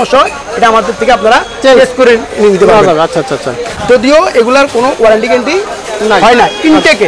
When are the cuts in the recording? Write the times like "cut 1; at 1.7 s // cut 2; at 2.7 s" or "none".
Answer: none